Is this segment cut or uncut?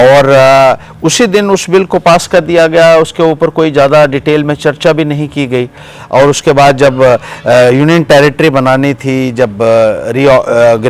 uncut